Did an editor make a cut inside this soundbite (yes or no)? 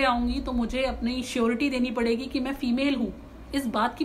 no